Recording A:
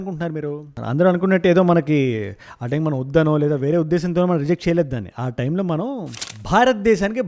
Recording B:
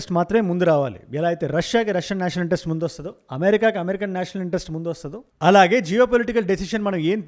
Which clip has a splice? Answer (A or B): A